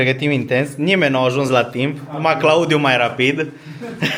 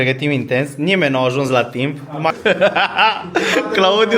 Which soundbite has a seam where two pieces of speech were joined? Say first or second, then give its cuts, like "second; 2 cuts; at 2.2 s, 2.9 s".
second; 1 cut; at 2.3 s